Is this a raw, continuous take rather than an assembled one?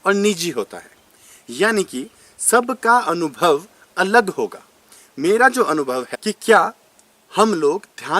no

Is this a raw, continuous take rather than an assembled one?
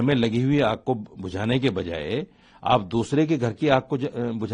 yes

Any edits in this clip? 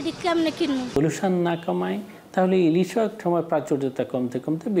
yes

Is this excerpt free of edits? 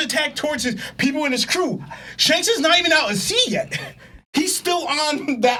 yes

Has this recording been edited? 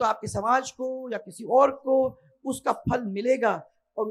no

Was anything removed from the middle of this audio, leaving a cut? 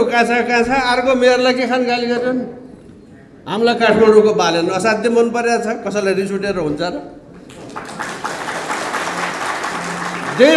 no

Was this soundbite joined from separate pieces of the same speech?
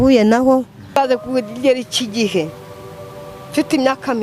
yes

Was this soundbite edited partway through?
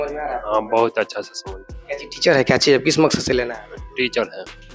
no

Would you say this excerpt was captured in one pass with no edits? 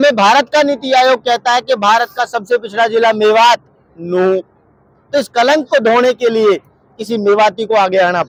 yes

